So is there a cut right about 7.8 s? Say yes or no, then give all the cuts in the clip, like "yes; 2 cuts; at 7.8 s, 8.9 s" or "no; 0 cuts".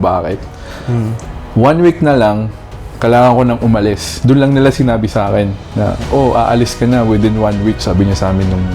yes; 1 cut; at 7.8 s